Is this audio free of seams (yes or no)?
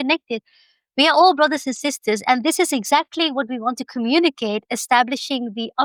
yes